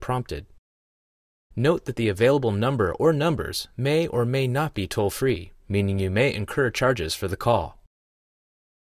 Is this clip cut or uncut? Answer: cut